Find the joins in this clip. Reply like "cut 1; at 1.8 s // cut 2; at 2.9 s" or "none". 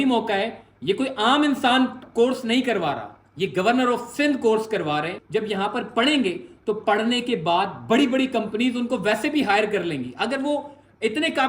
cut 1; at 5.2 s